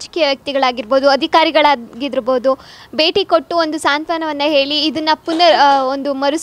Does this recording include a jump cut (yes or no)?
no